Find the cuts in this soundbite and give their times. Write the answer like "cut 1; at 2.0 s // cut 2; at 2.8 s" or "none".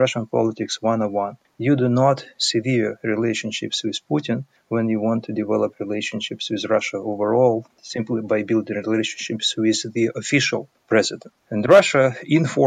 none